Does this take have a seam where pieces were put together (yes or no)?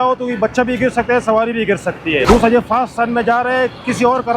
yes